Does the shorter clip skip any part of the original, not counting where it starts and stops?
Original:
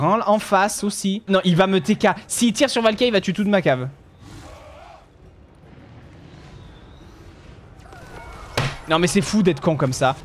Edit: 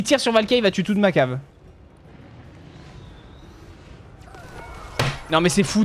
yes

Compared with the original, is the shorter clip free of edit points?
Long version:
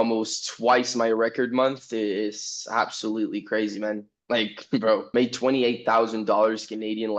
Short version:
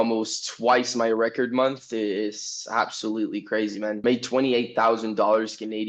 no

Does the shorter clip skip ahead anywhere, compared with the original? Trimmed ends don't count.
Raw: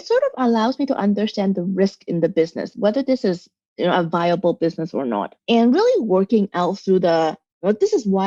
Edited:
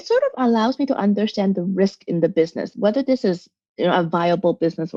no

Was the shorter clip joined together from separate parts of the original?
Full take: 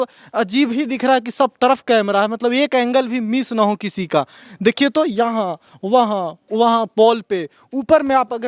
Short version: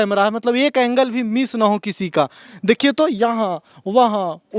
no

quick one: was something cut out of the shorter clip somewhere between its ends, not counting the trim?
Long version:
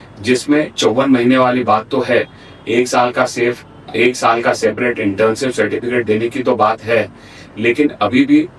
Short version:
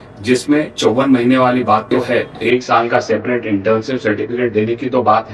yes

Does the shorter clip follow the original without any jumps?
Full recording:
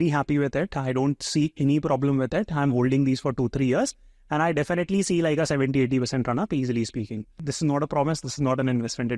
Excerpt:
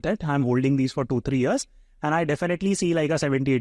yes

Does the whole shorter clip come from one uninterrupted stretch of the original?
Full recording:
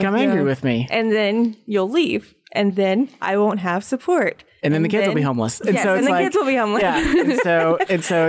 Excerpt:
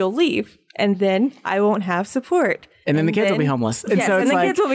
yes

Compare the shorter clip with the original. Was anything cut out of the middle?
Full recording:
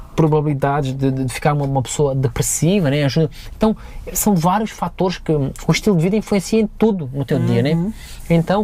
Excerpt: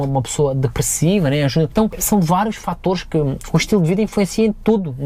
yes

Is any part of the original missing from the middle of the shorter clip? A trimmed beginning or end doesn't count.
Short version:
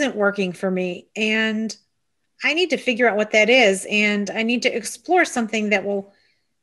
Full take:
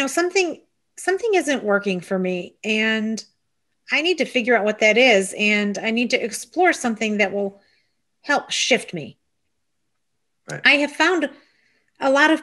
no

